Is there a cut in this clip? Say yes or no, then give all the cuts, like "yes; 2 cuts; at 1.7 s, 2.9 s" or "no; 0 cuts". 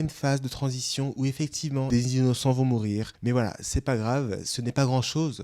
yes; 2 cuts; at 1.9 s, 3.1 s